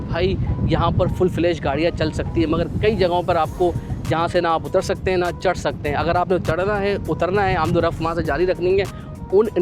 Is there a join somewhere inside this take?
no; 0 cuts

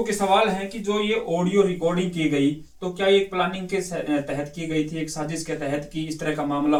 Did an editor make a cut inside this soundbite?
no; 0 cuts

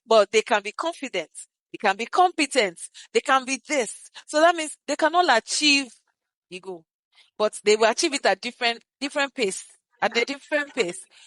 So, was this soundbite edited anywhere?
no; 0 cuts

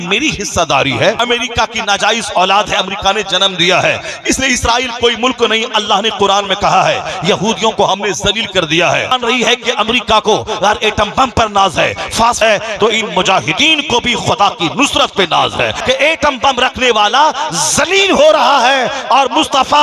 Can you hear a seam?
yes; 4 cuts; at 1.2 s, 9.2 s, 12.4 s, 15.8 s

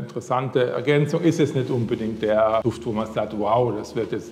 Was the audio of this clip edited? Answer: no; 0 cuts

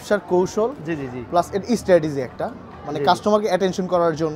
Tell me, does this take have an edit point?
no; 0 cuts

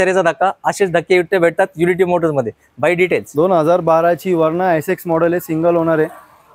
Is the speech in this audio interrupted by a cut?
no; 0 cuts

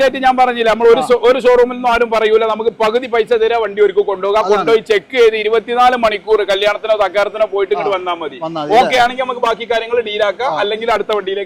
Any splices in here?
no; 0 cuts

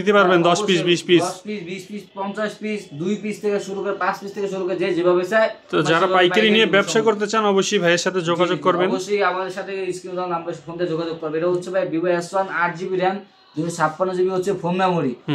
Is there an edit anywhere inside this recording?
no; 0 cuts

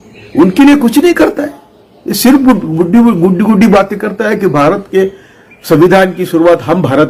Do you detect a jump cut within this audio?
no; 0 cuts

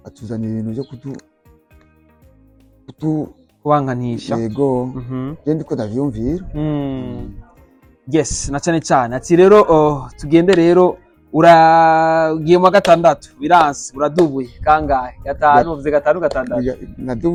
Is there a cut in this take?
no; 0 cuts

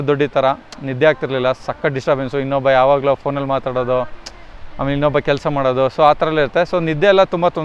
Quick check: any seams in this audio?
no; 0 cuts

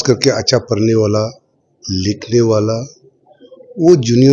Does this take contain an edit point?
no; 0 cuts

